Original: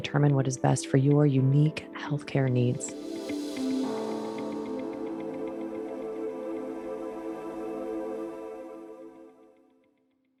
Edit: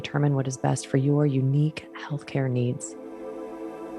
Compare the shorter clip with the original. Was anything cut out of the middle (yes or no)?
yes